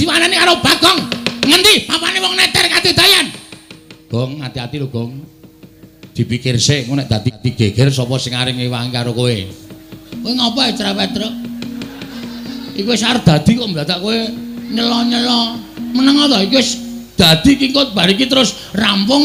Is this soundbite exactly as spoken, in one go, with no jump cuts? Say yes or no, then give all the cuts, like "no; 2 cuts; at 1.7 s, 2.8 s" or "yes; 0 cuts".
yes; 0 cuts